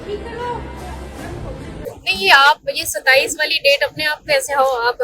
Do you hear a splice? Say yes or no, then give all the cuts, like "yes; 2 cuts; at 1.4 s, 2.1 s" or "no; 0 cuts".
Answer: yes; 1 cut; at 2.0 s